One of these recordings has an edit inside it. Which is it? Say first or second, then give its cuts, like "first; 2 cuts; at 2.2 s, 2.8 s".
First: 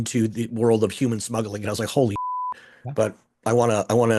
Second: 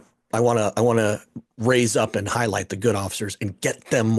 first; 1 cut; at 2.2 s